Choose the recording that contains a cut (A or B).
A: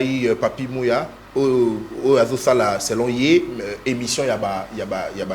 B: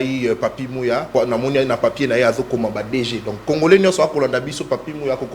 B